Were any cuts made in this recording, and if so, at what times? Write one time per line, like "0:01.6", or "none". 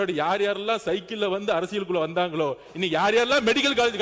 none